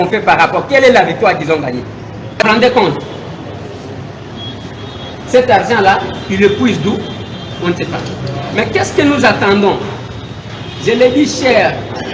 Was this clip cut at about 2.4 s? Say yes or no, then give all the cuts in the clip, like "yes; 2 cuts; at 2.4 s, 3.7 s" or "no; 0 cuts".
yes; 1 cut; at 2.4 s